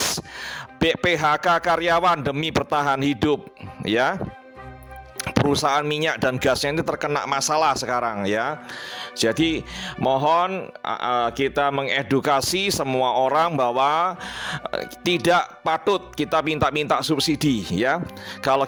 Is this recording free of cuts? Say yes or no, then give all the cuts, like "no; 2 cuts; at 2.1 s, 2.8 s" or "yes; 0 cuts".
yes; 0 cuts